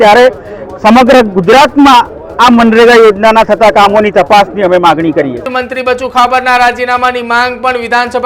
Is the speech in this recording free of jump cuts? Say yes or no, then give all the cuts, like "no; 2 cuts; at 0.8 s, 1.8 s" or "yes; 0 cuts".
no; 1 cut; at 5.5 s